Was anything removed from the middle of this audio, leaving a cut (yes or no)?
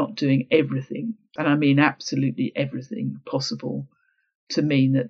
yes